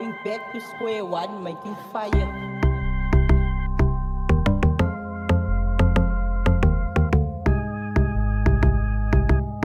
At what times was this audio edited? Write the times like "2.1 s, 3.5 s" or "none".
none